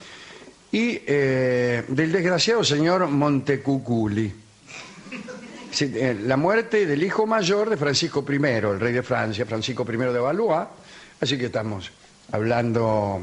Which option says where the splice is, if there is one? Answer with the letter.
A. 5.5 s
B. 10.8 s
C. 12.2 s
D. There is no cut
B